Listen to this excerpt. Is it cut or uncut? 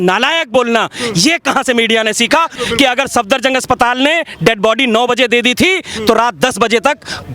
cut